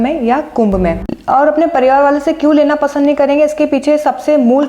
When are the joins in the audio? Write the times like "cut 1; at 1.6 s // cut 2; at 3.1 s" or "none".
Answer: cut 1; at 1.1 s